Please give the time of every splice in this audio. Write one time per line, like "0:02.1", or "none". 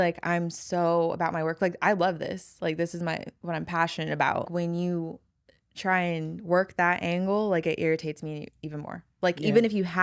0:04.5